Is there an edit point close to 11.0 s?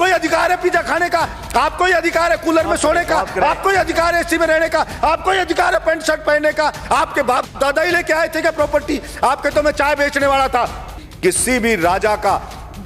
yes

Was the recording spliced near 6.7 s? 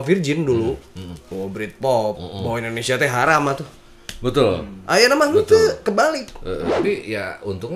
yes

